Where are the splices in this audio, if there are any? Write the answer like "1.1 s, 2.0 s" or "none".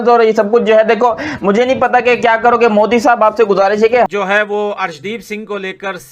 4.1 s